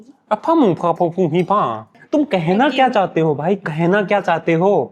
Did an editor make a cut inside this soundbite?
yes; 1 cut; at 1.9 s

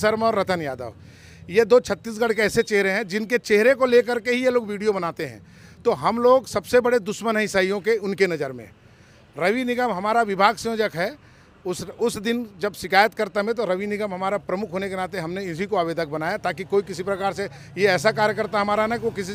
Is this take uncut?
yes; 0 cuts

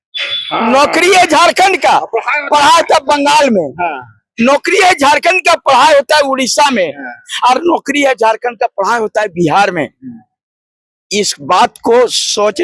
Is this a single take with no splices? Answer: yes; 0 cuts

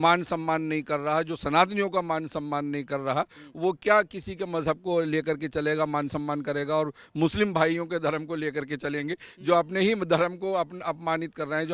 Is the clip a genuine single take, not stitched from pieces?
yes; 0 cuts

